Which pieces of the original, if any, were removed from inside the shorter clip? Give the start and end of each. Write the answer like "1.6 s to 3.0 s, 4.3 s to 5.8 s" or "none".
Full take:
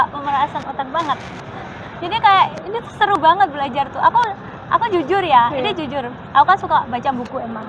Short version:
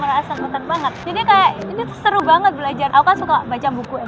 1.3 s to 2.0 s, 3.9 s to 6.3 s